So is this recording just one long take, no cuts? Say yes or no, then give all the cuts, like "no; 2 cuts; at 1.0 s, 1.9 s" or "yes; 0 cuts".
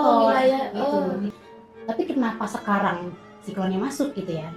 no; 1 cut; at 1.3 s